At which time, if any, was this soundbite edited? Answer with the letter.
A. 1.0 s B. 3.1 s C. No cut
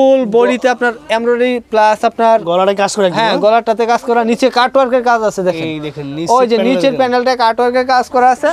C